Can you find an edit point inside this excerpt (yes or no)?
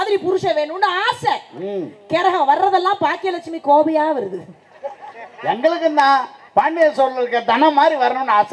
no